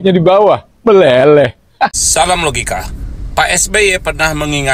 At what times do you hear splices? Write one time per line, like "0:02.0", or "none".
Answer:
0:02.0

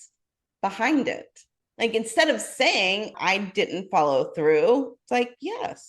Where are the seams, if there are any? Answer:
0:03.1

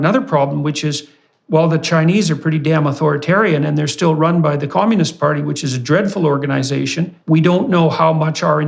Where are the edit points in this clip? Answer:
0:07.1

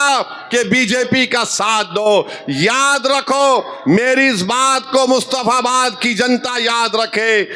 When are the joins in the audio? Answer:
0:04.0

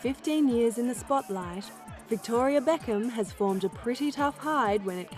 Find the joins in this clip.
0:03.9

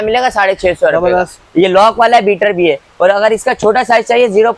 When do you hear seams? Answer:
none

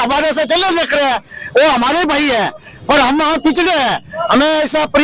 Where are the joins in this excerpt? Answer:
none

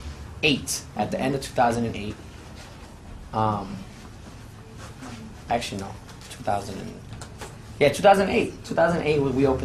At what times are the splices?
none

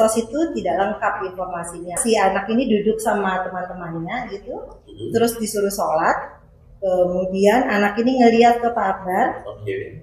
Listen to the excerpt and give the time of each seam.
0:02.0

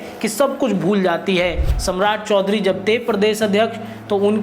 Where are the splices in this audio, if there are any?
0:01.7

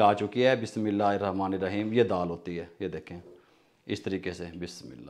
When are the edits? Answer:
none

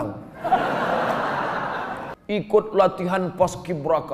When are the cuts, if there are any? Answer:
0:02.1

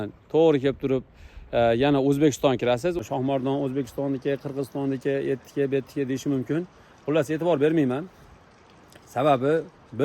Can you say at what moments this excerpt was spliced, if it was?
0:03.0

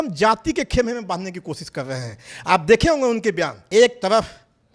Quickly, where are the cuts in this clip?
0:03.6

